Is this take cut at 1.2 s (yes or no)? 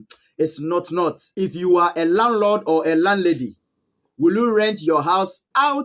yes